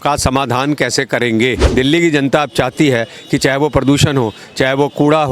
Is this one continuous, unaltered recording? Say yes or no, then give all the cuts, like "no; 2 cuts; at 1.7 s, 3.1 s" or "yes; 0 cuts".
no; 1 cut; at 1.6 s